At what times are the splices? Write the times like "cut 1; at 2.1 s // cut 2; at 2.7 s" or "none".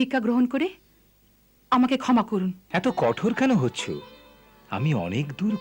cut 1; at 2.6 s

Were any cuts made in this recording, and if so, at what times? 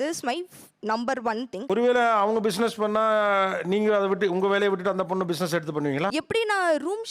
cut 1; at 1.6 s // cut 2; at 6.1 s

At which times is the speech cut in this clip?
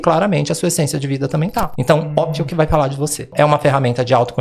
cut 1; at 1.7 s // cut 2; at 3.3 s

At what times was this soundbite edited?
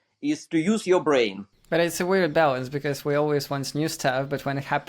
cut 1; at 1.5 s

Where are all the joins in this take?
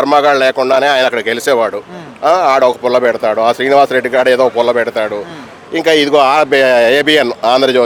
none

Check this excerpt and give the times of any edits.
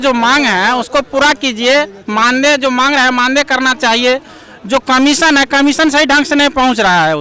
none

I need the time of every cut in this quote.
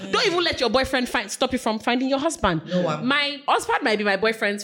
cut 1; at 3.3 s

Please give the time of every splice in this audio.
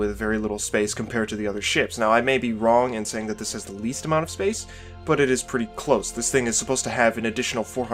none

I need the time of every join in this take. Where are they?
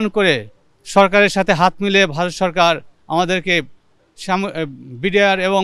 none

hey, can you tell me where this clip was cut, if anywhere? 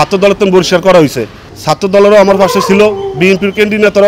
cut 1; at 1.5 s

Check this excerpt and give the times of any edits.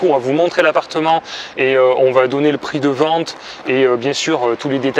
none

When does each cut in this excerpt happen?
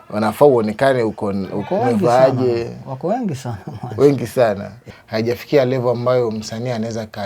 cut 1; at 4.8 s

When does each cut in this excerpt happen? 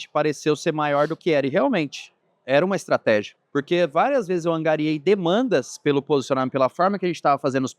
cut 1; at 3.4 s

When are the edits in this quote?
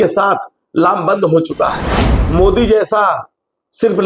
cut 1; at 2.0 s

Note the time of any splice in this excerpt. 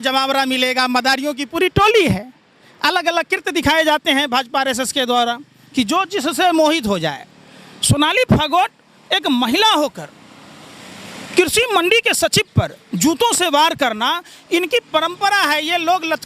none

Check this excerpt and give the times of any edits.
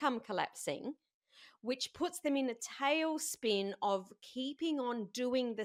none

